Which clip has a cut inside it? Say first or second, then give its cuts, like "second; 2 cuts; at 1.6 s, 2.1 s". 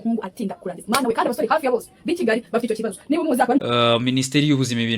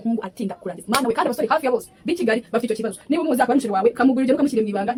first; 1 cut; at 3.6 s